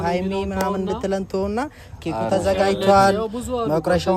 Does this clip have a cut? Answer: no; 0 cuts

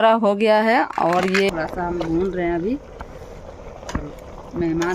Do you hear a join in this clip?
yes; 1 cut; at 1.5 s

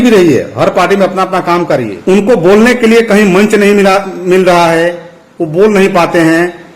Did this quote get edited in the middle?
yes; 1 cut; at 1.9 s

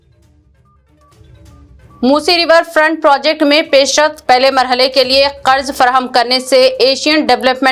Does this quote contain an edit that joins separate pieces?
yes; 1 cut; at 1.7 s

